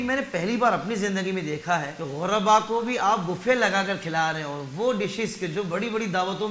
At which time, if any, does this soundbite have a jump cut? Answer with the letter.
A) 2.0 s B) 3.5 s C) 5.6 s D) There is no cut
A